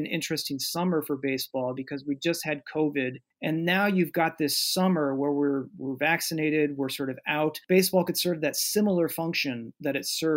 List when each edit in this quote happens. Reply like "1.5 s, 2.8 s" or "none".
3.3 s, 7.6 s